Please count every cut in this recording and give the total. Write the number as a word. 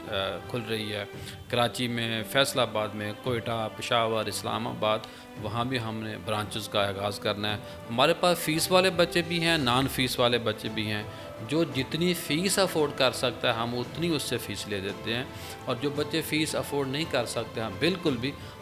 zero